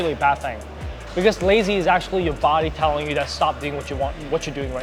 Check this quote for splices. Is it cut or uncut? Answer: uncut